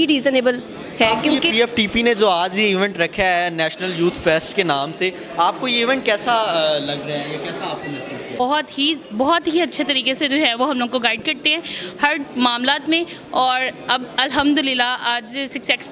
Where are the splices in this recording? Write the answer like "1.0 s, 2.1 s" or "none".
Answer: 1.5 s, 8.4 s

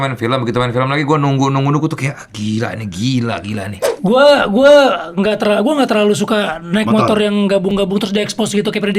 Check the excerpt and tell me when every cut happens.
3.9 s

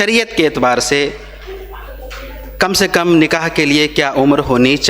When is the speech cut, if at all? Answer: none

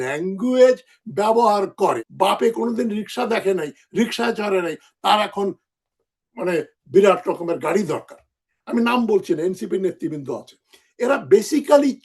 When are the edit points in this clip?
2.1 s

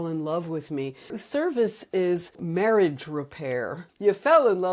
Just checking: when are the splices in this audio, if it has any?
1.2 s, 2.4 s, 3.8 s

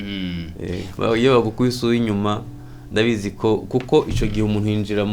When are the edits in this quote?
1.0 s

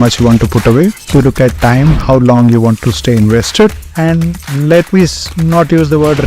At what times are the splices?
1.0 s, 3.8 s

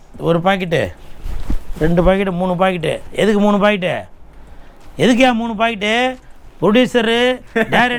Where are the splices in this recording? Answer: none

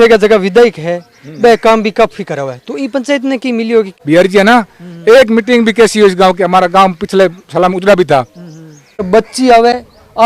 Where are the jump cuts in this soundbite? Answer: 3.9 s, 9.1 s

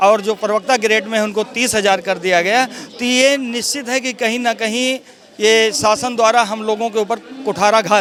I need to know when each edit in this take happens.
none

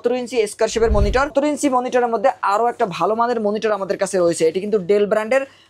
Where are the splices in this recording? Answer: 1.3 s

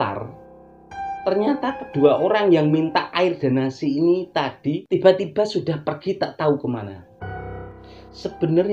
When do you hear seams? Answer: 7.7 s

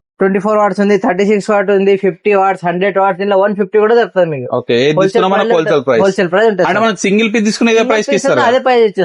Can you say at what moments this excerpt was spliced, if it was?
none

